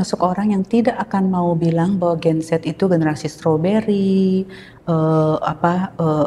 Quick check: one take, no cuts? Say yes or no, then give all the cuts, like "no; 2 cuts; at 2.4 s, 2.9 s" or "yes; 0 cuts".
yes; 0 cuts